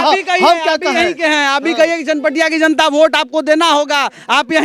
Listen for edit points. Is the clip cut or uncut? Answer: uncut